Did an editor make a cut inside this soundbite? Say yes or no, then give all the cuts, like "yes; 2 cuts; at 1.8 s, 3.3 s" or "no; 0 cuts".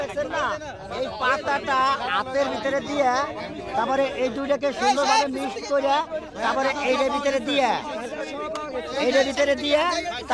no; 0 cuts